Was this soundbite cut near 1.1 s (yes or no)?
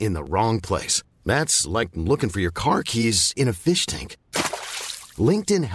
no